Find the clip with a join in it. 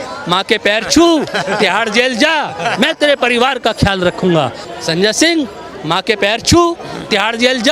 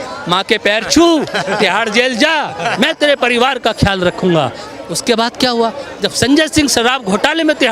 first; 1 cut; at 4.7 s

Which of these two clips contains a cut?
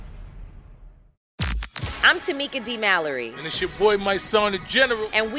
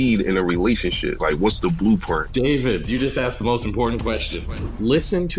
first; 1 cut; at 1.3 s

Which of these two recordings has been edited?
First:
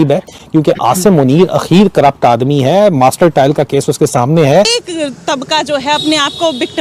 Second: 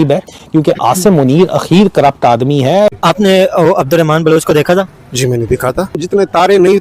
second; 2 cuts; at 2.9 s, 6.0 s

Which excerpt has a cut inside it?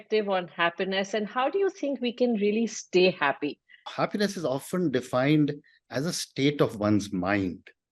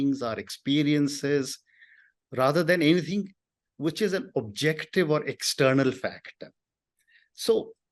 first; 1 cut; at 3.9 s

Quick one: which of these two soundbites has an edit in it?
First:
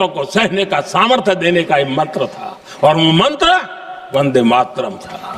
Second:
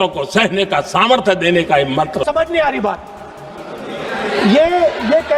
second; 1 cut; at 2.2 s

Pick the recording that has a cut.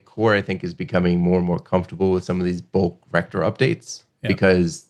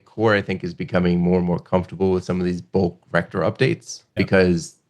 second; 1 cut; at 3.9 s

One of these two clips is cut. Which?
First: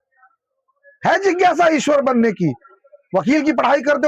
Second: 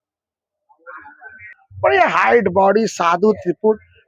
second; 1 cut; at 1.6 s

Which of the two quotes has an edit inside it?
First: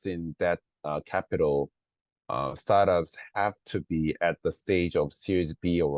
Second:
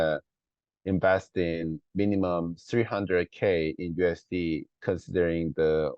second; 1 cut; at 4.8 s

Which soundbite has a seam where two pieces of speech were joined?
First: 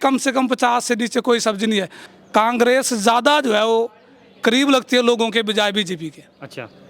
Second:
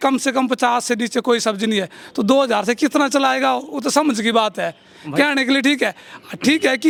first; 1 cut; at 2.0 s

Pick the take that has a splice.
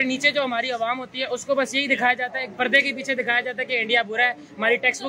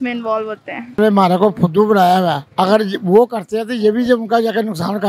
second; 1 cut; at 1.0 s

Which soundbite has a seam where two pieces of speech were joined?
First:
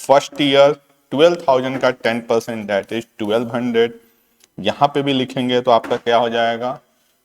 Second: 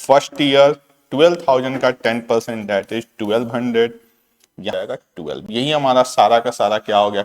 second; 1 cut; at 4.8 s

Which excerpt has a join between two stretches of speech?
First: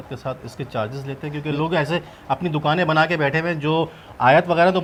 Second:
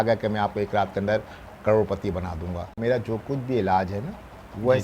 second; 1 cut; at 2.8 s

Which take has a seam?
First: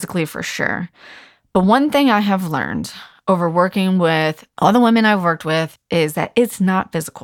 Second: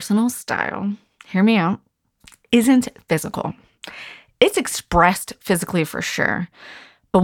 first; 2 cuts; at 4.4 s, 5.8 s

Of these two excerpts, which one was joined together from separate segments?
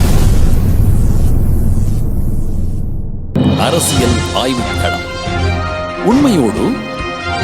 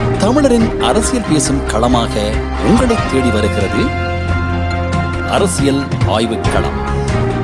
first; 1 cut; at 3.4 s

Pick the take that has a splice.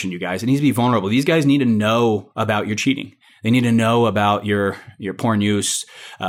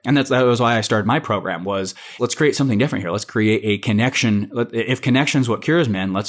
second; 1 cut; at 2.1 s

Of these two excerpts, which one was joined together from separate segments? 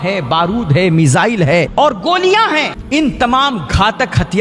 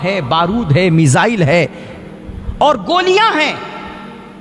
first; 2 cuts; at 1.7 s, 2.8 s

